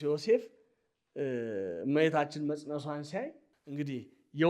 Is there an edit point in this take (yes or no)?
yes